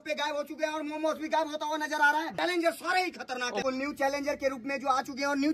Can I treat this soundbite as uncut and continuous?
no; 2 cuts; at 2.3 s, 3.6 s

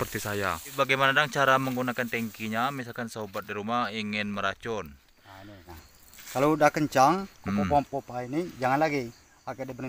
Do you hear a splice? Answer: yes; 2 cuts; at 0.7 s, 5.8 s

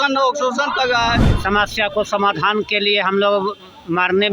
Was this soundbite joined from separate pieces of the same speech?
yes; 1 cut; at 1.3 s

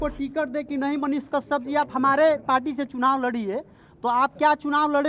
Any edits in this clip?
no; 0 cuts

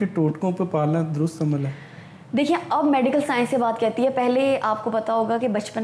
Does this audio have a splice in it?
no; 0 cuts

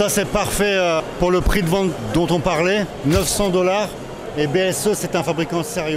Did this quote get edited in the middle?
yes; 3 cuts; at 1.1 s, 2.0 s, 2.9 s

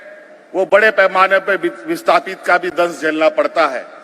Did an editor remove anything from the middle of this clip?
no; 0 cuts

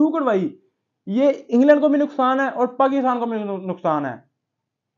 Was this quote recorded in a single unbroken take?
yes; 0 cuts

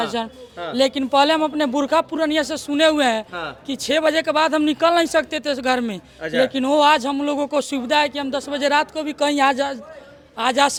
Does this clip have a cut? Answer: no; 0 cuts

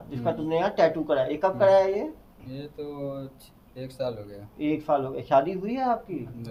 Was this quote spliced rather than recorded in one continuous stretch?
no; 0 cuts

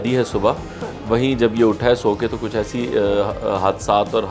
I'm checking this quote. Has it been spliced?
no; 0 cuts

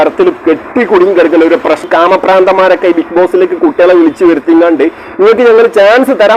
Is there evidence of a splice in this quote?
yes; 1 cut; at 1.8 s

